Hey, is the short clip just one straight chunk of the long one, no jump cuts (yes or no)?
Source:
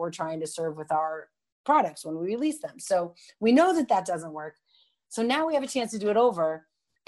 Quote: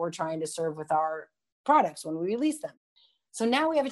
no